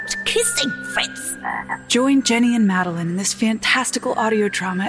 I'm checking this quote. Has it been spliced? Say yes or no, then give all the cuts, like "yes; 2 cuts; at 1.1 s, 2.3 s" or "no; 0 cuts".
yes; 1 cut; at 1.8 s